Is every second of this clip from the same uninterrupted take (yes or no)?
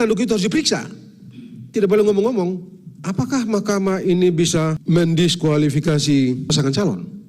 no